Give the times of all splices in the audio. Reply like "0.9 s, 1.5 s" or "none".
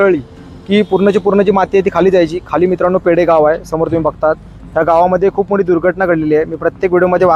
none